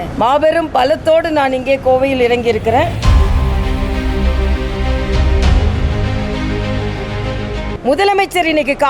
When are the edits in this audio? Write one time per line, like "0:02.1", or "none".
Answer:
0:02.9
0:07.7